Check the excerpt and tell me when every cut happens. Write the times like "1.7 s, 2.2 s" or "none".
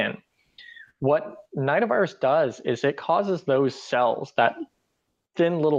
none